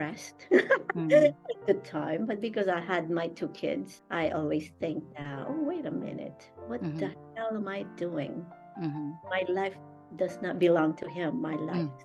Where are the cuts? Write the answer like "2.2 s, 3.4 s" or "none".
none